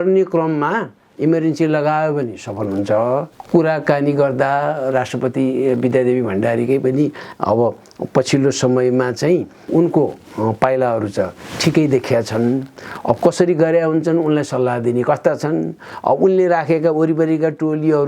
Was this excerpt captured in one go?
no; 2 cuts; at 3.3 s, 9.6 s

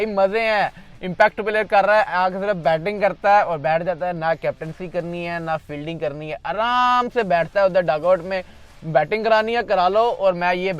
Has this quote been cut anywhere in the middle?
no; 0 cuts

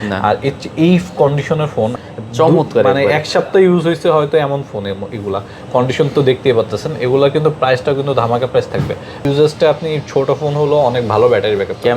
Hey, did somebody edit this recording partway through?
yes; 2 cuts; at 2.0 s, 9.2 s

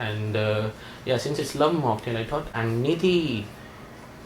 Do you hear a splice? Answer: yes; 1 cut; at 2.5 s

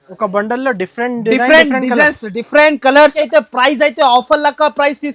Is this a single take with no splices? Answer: no; 1 cut; at 3.2 s

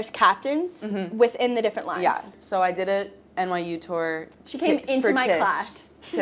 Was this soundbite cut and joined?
yes; 1 cut; at 2.3 s

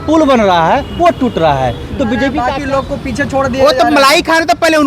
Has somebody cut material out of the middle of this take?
yes; 1 cut; at 2.4 s

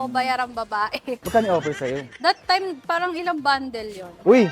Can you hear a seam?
yes; 1 cut; at 1.2 s

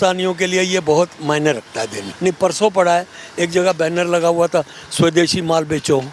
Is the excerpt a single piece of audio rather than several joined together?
no; 1 cut; at 2.0 s

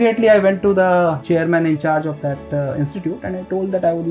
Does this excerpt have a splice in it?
no; 0 cuts

